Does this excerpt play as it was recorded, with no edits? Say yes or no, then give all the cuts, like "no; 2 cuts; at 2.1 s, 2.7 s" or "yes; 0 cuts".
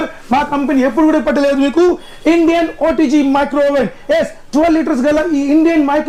yes; 0 cuts